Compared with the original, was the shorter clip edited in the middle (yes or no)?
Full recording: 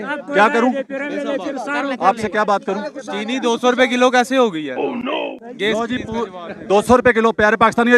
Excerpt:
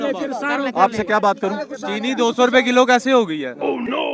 no